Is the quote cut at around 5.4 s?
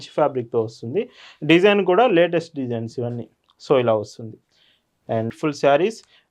yes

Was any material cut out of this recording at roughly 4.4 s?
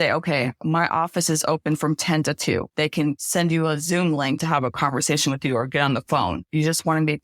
yes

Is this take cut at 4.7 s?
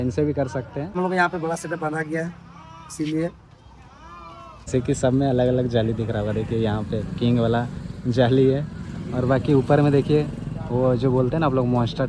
yes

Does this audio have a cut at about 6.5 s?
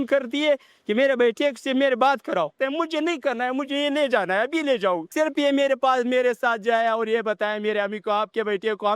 no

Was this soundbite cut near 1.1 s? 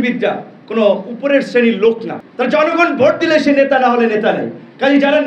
yes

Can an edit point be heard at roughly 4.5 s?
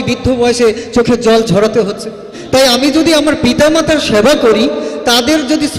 no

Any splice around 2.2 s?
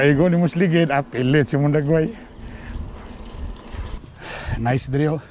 no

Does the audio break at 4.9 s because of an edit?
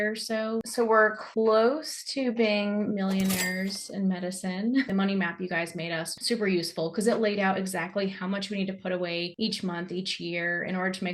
yes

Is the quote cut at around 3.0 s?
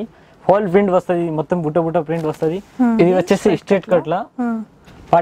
yes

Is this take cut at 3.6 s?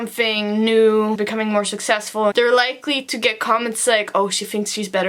no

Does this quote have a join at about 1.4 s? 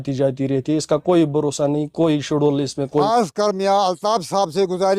no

